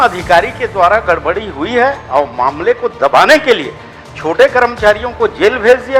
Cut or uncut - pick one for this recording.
uncut